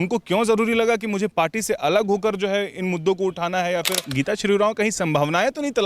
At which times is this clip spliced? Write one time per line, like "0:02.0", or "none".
0:04.0